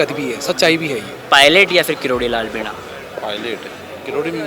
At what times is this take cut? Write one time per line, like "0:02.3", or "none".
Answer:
0:01.2

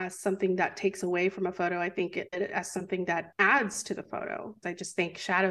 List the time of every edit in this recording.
0:02.3
0:03.3
0:04.7

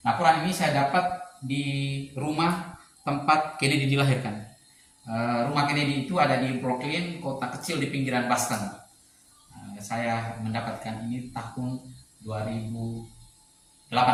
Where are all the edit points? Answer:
none

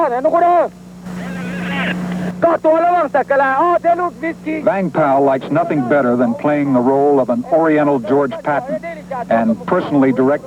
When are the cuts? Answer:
none

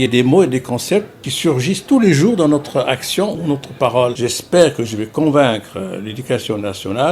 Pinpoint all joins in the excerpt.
0:04.2

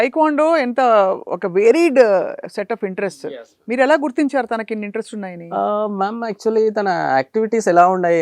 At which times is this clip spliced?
none

